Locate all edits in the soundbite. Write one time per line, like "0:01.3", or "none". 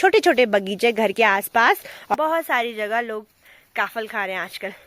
0:02.1